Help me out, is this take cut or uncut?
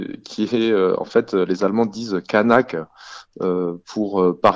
uncut